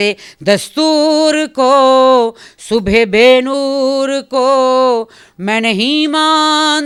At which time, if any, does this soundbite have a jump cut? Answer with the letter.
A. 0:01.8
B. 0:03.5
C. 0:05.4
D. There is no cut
D